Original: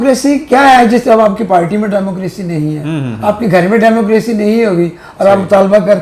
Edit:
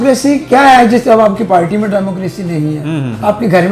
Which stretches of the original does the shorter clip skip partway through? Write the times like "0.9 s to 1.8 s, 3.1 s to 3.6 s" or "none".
none